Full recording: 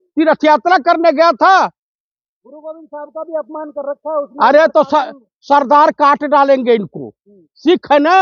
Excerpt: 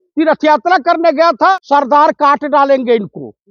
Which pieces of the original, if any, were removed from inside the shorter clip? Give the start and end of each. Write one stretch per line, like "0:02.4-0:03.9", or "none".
0:01.6-0:05.3